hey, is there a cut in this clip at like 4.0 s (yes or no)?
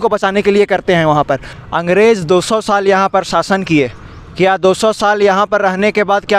no